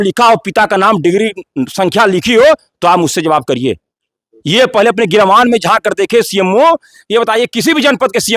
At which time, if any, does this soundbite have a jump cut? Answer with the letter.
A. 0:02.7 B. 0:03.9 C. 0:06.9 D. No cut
D